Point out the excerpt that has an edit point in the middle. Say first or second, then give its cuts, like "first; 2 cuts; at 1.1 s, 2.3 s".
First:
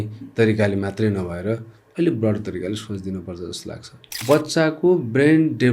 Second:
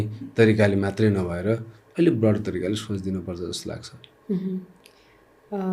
first; 1 cut; at 4.2 s